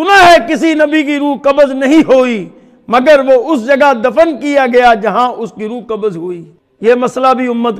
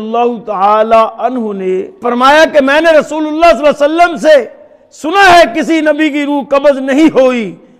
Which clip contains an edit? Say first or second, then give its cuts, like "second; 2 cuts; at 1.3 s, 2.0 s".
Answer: second; 1 cut; at 2.0 s